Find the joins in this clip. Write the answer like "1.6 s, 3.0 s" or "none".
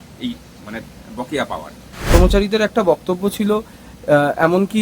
2.1 s

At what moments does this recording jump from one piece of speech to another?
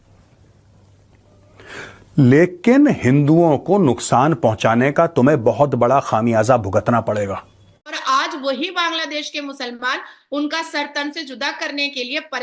8.0 s

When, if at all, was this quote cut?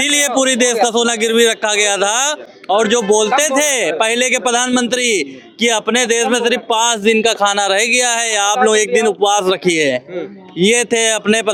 none

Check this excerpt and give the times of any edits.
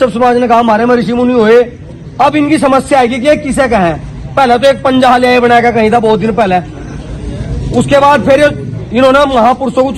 none

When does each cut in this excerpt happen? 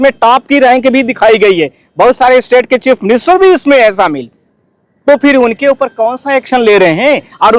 none

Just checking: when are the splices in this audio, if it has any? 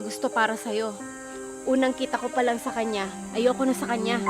none

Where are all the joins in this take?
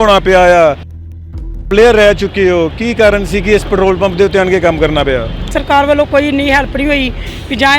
1.2 s, 5.5 s

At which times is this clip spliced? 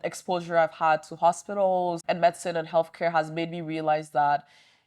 2.0 s

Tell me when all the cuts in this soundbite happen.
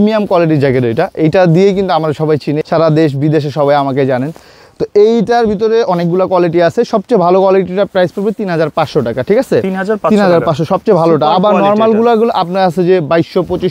none

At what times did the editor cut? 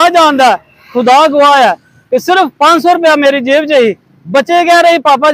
none

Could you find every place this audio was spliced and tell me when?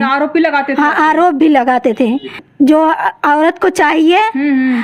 2.5 s

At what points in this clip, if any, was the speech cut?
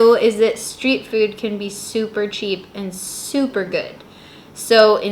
4.2 s

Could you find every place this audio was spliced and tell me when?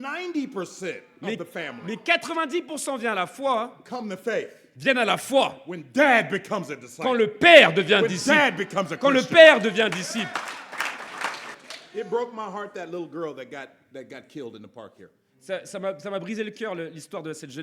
11.4 s

